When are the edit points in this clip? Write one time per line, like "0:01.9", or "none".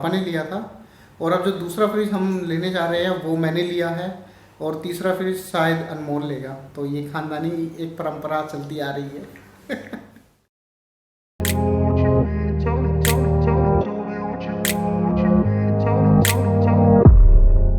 none